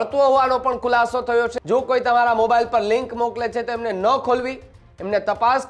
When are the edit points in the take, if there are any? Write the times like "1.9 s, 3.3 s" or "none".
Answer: 1.6 s